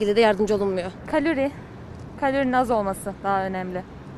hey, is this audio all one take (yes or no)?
no